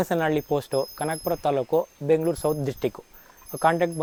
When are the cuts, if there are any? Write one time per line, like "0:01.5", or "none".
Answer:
none

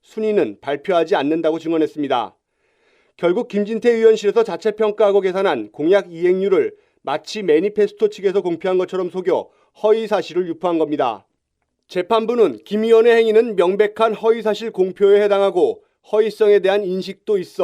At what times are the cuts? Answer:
0:15.8

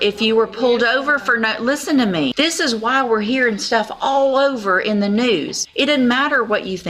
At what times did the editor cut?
0:02.3
0:05.6

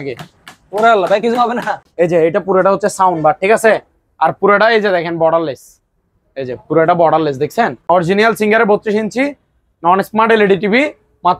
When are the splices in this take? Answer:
0:01.9
0:07.9

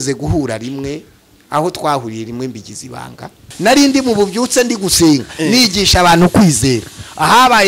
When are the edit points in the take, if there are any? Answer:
0:03.5

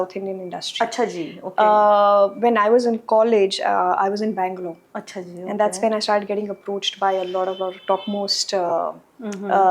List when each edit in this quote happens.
none

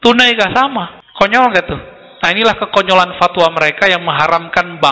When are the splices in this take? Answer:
0:01.0

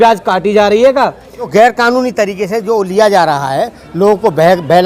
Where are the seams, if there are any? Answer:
0:01.5

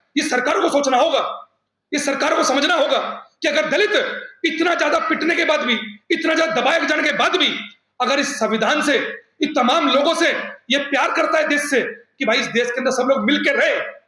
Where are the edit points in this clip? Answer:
none

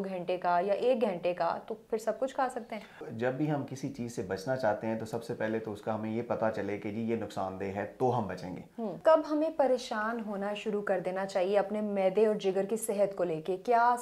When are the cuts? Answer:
0:03.1
0:09.0

